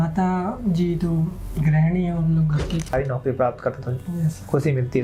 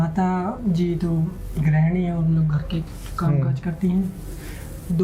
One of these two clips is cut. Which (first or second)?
first